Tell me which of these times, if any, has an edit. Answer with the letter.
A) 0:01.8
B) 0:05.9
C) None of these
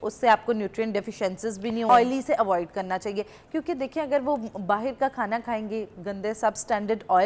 A